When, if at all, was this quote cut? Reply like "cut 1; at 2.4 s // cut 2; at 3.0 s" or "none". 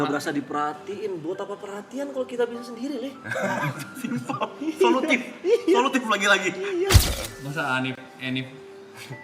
cut 1; at 7.0 s